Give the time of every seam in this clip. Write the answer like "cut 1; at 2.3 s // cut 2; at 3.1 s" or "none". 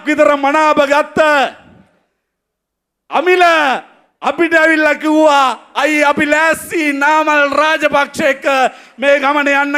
none